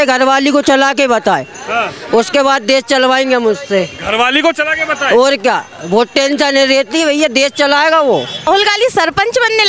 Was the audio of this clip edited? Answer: yes; 1 cut; at 8.5 s

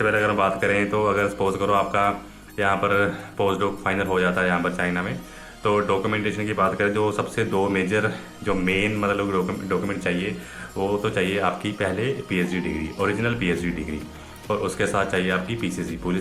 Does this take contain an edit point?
no; 0 cuts

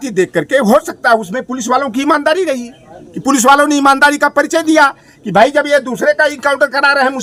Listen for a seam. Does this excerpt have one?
no; 0 cuts

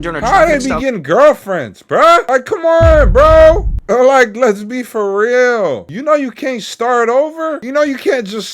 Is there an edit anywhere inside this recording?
yes; 4 cuts; at 2.2 s, 3.7 s, 5.9 s, 7.6 s

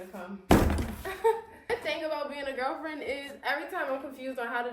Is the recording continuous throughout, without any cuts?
no; 1 cut; at 1.6 s

